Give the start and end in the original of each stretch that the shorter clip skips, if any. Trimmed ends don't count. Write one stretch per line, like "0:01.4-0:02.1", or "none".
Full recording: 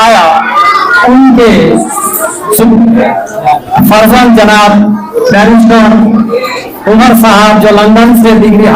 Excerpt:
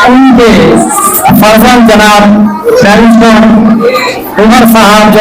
0:02.2-0:03.6